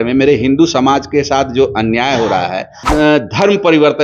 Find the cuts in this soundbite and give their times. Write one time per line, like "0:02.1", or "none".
0:02.8

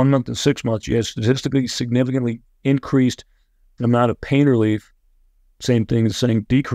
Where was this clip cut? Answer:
none

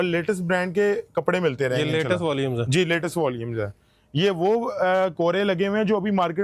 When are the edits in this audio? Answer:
none

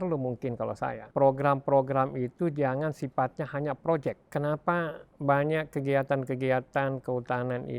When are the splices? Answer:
0:01.0
0:04.2

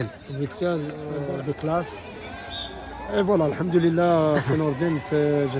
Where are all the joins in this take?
0:01.1

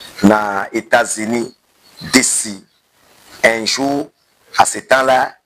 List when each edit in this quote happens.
none

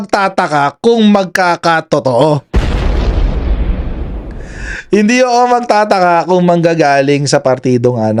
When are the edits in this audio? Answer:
none

